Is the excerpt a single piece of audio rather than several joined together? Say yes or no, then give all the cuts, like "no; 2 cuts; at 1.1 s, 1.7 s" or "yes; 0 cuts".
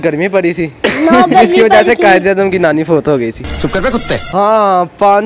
no; 1 cut; at 3.8 s